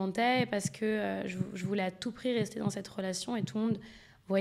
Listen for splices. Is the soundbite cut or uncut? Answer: uncut